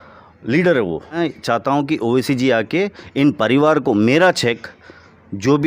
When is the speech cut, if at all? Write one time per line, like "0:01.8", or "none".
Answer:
0:01.2

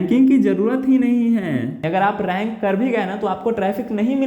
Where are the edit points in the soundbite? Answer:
0:01.8

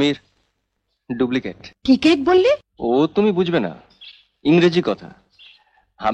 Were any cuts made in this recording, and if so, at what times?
0:01.7
0:02.7

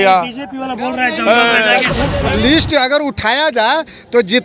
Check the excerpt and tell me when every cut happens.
0:02.2

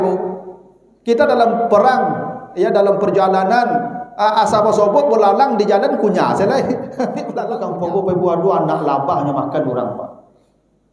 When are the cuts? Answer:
0:07.4

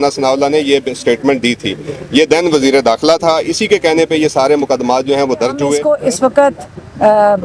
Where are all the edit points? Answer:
0:05.8

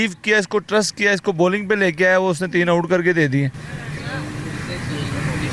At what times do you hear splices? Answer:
0:03.7

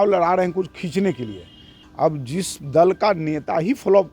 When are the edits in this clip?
0:01.8

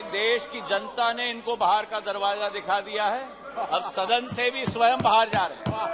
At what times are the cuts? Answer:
none

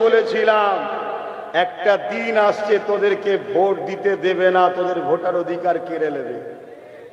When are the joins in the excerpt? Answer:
none

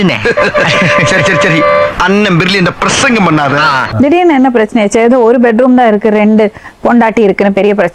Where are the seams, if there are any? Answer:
0:03.9

